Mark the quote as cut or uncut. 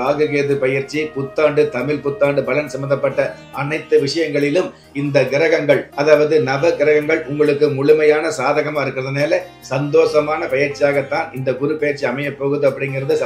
uncut